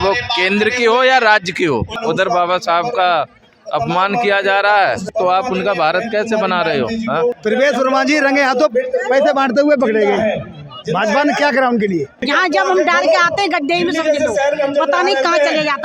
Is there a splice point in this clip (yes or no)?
yes